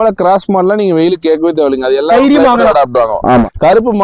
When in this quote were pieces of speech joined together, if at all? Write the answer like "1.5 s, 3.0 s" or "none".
none